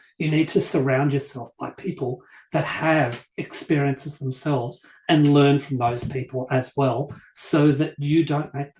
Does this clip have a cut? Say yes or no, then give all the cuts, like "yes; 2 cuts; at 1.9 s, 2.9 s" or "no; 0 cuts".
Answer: no; 0 cuts